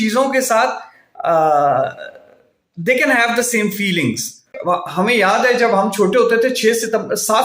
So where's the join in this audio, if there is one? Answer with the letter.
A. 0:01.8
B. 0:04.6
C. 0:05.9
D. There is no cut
B